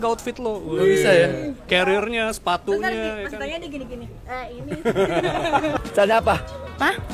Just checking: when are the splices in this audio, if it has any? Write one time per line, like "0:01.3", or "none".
0:05.8